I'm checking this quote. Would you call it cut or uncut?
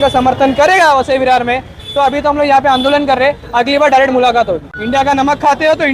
cut